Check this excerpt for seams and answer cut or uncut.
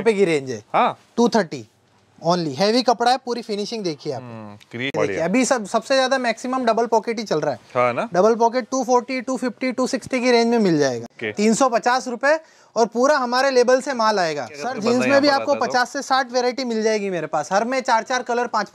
cut